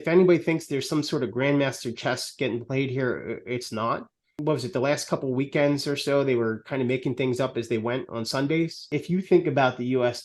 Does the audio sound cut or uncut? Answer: cut